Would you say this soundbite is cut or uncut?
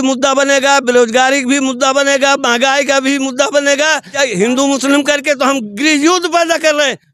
cut